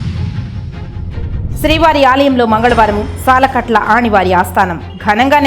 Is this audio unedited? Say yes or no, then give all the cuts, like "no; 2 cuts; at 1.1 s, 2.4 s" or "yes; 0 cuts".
no; 1 cut; at 1.6 s